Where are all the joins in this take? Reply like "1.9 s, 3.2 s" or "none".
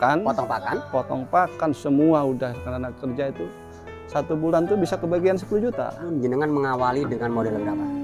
5.9 s